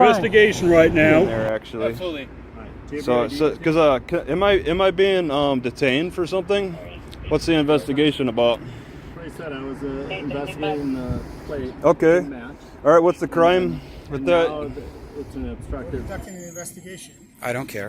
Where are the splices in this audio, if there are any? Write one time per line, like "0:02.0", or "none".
0:01.3
0:15.8